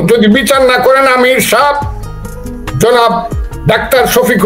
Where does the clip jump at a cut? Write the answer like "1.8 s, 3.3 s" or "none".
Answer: none